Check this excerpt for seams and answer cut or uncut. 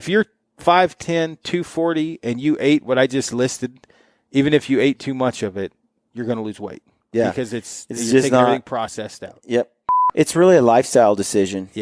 cut